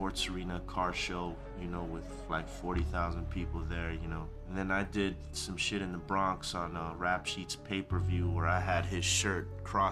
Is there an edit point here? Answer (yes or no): yes